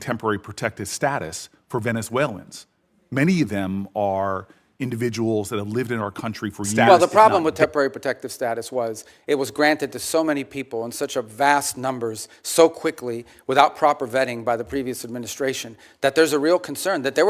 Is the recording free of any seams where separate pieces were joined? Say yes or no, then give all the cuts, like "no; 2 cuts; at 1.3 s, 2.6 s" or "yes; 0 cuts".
no; 1 cut; at 6.7 s